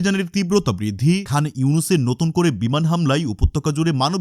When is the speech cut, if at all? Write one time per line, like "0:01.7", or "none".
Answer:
none